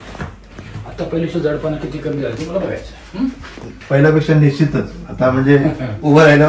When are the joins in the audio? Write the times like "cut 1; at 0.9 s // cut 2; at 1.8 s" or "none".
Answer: cut 1; at 3.7 s